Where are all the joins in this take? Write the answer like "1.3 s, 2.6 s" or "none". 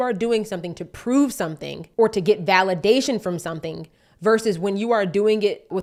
none